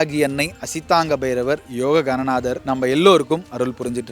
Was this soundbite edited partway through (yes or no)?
yes